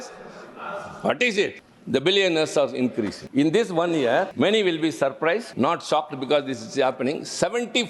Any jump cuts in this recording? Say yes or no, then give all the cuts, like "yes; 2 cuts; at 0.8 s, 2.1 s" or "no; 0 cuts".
yes; 4 cuts; at 1.7 s, 3.2 s, 4.3 s, 5.5 s